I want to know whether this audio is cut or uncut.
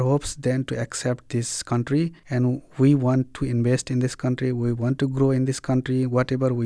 cut